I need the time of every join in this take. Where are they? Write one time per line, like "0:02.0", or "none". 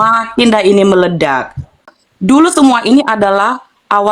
0:01.8